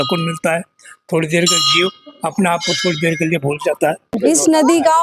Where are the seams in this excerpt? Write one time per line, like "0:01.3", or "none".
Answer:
0:04.1